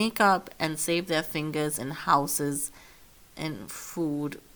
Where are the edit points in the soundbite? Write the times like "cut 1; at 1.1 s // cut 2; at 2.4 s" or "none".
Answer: none